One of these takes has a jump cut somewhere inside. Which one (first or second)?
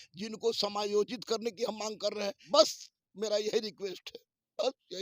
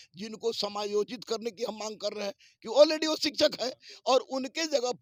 first